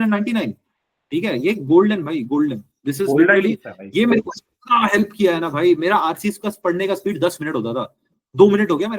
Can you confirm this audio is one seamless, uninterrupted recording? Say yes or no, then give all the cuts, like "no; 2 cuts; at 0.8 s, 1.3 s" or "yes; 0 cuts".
yes; 0 cuts